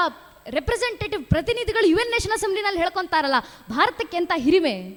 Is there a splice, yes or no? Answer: no